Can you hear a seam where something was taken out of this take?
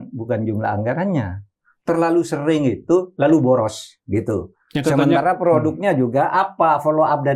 no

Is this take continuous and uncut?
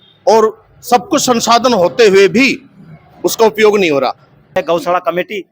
no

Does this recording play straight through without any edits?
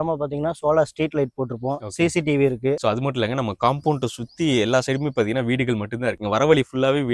no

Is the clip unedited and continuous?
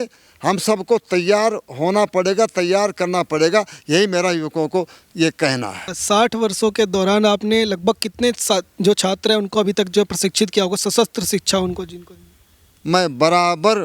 no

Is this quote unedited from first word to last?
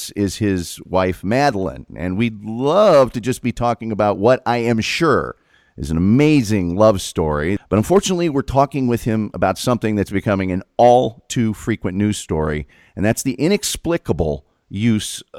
no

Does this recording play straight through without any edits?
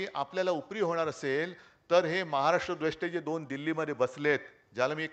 yes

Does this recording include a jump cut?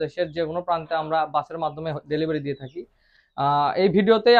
no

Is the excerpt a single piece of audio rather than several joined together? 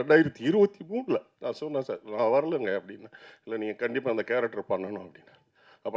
no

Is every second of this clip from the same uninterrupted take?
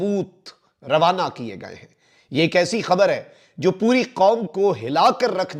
yes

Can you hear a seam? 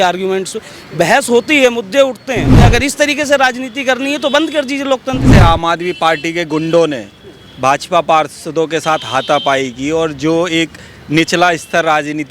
yes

